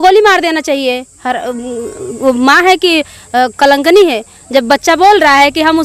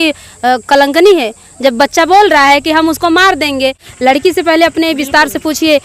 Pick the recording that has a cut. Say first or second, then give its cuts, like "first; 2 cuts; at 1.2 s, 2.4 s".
second; 1 cut; at 3.9 s